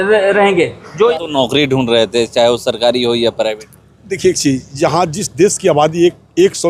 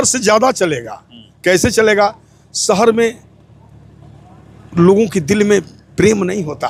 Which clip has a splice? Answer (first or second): first